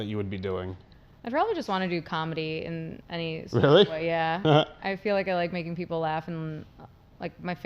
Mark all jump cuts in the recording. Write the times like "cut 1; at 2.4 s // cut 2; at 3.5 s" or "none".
none